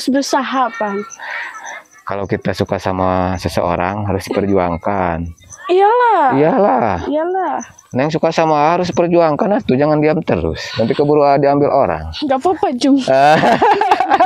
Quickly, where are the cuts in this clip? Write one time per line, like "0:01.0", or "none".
none